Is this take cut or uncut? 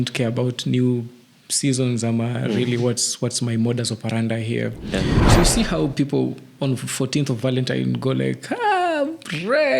cut